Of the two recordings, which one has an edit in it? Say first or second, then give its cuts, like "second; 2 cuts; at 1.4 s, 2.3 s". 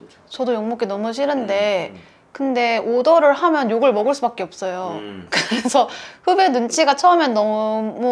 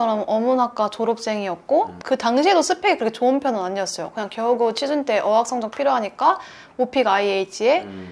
second; 1 cut; at 2.0 s